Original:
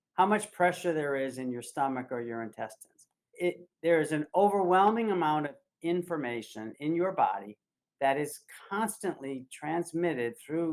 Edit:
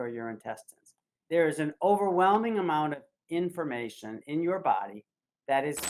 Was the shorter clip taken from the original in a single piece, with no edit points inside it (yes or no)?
no